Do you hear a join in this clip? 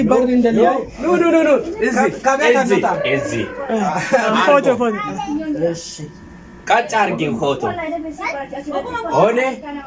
no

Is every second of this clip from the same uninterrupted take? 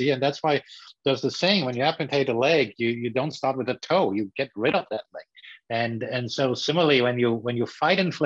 yes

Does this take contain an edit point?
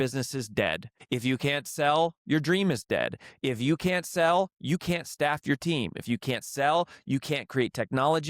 yes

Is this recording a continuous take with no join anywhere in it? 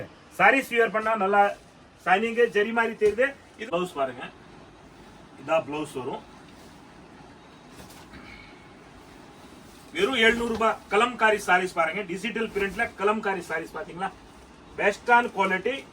no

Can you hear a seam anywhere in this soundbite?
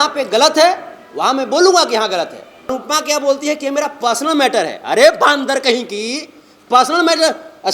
yes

